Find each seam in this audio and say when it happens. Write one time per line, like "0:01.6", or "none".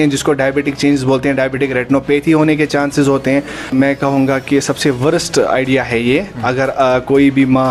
0:03.7